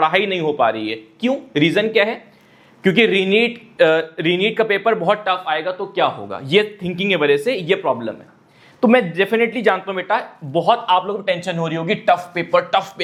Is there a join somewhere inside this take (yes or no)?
no